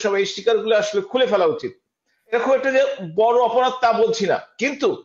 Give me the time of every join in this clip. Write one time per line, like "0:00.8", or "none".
0:02.3